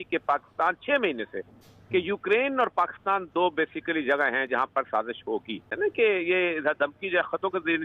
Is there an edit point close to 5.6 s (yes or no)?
yes